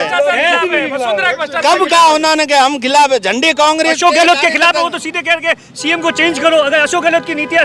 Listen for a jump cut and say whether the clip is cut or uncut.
uncut